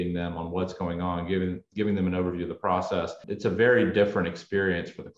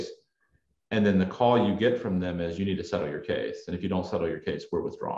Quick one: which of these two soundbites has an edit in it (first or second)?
first